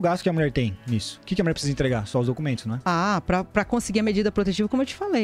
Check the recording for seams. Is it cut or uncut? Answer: uncut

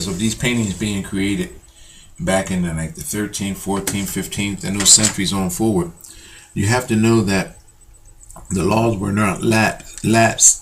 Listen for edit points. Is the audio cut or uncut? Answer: cut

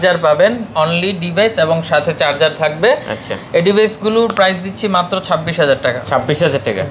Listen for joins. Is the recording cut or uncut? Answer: uncut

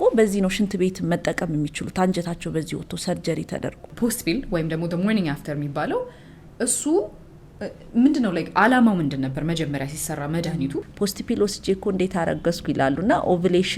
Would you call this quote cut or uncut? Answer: cut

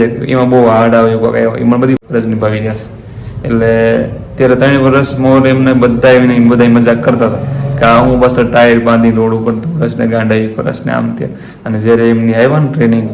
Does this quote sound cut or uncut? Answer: cut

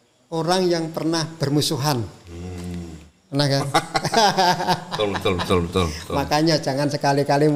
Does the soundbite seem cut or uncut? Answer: uncut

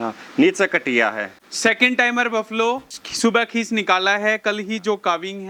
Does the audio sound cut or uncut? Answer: uncut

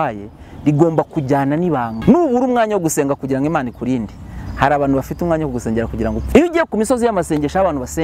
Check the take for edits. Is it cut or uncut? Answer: cut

